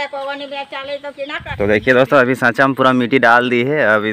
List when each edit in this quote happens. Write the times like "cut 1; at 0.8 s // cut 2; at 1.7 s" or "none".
cut 1; at 1.5 s